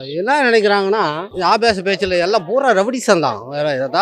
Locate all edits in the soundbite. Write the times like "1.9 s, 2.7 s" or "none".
1.3 s